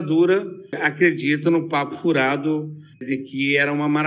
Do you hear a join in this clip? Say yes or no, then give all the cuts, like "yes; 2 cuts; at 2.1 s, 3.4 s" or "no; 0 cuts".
yes; 2 cuts; at 0.8 s, 3.0 s